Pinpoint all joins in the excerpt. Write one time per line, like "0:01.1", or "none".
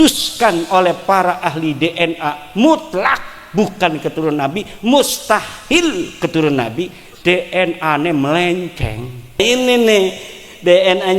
0:09.4

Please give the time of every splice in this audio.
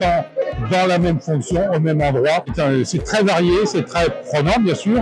none

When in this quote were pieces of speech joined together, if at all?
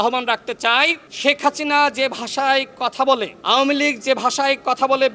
0:01.1
0:03.3

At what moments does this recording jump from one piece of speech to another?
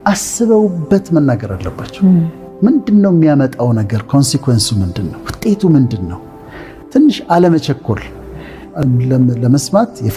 0:08.7

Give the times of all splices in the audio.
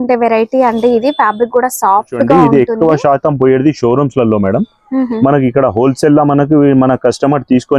0:02.3

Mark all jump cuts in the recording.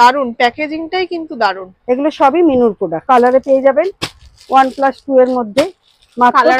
0:03.0

